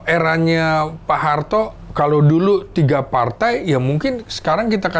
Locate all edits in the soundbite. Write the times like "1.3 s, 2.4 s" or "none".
none